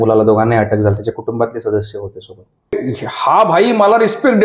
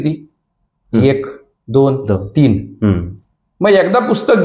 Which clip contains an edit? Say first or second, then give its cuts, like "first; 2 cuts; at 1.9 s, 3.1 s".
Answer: first; 1 cut; at 2.7 s